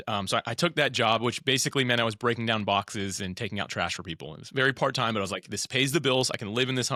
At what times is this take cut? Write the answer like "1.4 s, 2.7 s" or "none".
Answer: none